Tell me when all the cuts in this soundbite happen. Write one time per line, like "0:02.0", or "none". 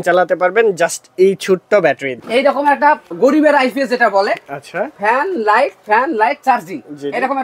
0:02.2
0:03.1